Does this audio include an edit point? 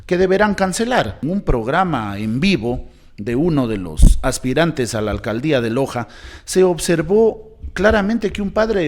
yes; 1 cut; at 1.2 s

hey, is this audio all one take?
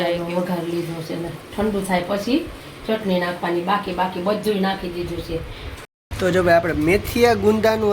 no; 1 cut; at 5.8 s

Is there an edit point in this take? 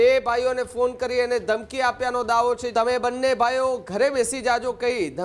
yes; 1 cut; at 2.6 s

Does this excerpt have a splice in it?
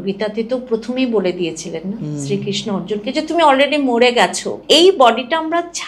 yes; 1 cut; at 4.6 s

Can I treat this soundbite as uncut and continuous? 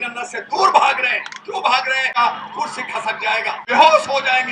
no; 2 cuts; at 2.1 s, 3.6 s

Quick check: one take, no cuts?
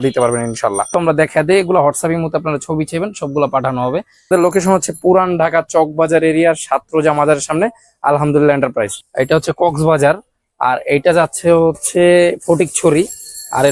no; 3 cuts; at 0.9 s, 4.3 s, 9.0 s

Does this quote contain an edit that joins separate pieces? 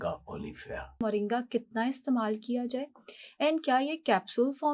yes; 1 cut; at 1.0 s

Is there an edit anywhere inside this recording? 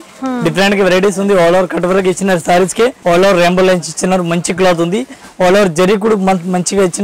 yes; 1 cut; at 3.0 s

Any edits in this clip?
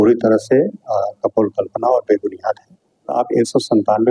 yes; 1 cut; at 3.1 s

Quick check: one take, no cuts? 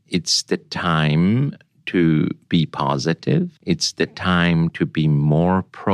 no; 2 cuts; at 2.4 s, 3.6 s

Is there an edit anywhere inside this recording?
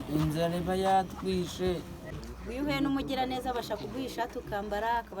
yes; 1 cut; at 2.1 s

